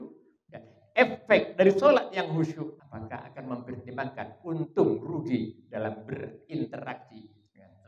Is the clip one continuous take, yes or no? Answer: no